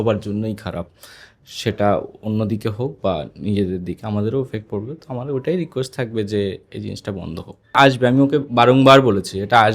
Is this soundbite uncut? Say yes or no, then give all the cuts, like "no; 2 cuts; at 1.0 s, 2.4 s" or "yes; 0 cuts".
no; 1 cut; at 7.8 s